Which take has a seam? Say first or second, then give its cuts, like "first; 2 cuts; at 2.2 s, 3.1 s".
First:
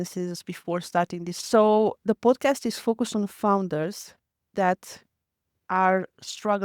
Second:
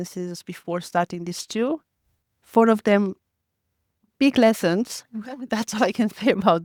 first; 1 cut; at 1.4 s